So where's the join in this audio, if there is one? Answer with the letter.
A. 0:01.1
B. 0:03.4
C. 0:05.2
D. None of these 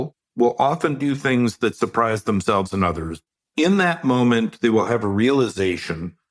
B